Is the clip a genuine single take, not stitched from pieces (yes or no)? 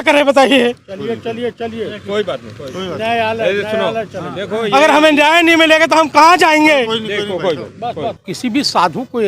no